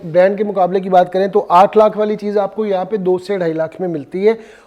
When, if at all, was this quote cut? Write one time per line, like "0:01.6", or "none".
none